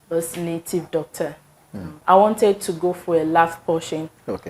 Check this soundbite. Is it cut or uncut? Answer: cut